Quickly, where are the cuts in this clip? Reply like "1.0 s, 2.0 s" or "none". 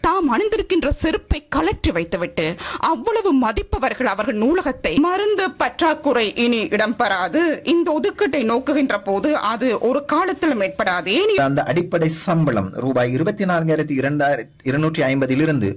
5.0 s, 11.4 s